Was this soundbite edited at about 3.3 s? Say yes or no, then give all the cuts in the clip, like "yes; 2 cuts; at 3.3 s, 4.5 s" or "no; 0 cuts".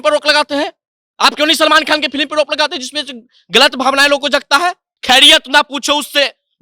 no; 1 cut; at 4.9 s